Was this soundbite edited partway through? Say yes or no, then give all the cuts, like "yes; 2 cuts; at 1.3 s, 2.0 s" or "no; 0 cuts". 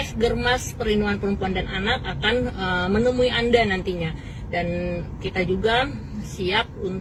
no; 0 cuts